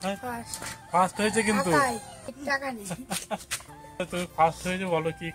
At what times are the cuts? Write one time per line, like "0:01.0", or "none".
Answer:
0:02.4
0:04.0